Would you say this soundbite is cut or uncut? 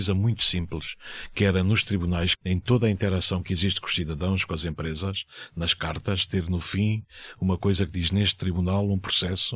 cut